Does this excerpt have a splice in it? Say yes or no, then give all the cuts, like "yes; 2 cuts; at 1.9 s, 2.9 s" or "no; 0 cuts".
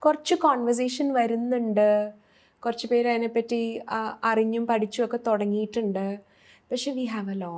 no; 0 cuts